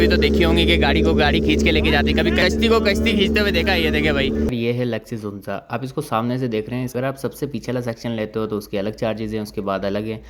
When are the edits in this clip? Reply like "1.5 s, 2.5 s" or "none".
2.4 s, 4.5 s, 6.9 s